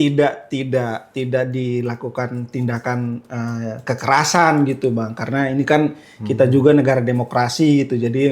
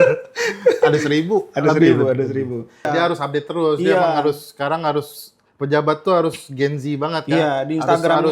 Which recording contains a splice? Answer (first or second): second